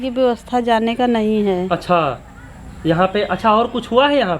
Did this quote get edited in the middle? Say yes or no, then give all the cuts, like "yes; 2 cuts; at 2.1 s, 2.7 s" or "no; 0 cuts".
no; 0 cuts